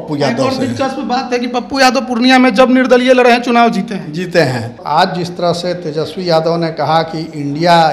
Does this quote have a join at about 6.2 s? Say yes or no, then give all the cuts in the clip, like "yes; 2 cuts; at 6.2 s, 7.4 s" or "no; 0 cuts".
no; 1 cut; at 4.8 s